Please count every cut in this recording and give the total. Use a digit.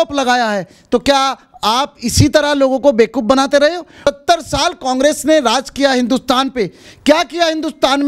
1